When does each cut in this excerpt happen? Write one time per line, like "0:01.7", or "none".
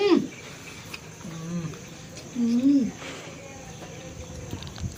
none